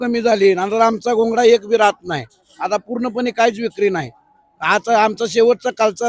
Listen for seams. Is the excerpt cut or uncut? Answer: uncut